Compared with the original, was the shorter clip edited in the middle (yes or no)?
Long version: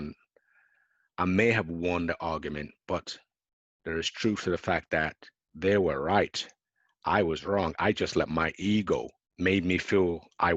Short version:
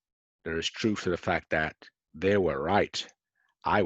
no